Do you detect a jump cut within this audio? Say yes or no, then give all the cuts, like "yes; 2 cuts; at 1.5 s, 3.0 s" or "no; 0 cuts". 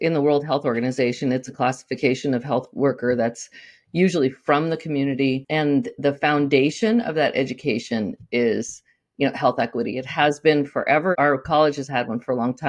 no; 0 cuts